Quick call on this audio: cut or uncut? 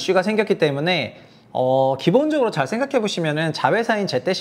uncut